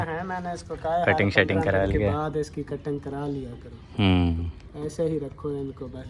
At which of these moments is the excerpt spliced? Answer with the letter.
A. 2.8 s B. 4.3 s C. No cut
C